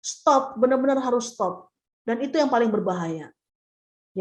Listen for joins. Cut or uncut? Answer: uncut